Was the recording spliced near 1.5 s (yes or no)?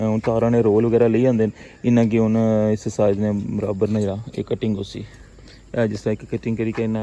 no